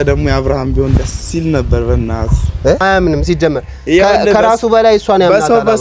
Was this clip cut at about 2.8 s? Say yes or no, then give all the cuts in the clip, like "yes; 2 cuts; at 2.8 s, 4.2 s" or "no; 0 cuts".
yes; 1 cut; at 2.8 s